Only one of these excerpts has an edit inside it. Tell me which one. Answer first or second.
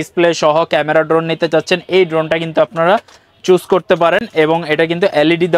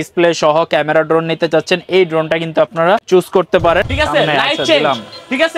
second